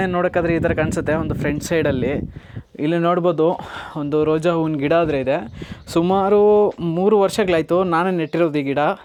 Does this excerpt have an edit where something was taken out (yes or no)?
no